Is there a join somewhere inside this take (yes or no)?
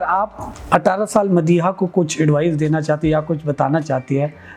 no